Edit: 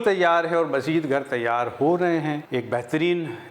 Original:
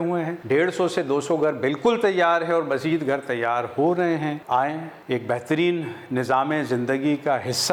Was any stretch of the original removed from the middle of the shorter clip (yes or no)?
yes